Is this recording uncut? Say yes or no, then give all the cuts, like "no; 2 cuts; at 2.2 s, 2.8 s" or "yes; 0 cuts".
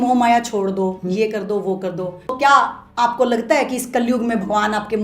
no; 1 cut; at 2.3 s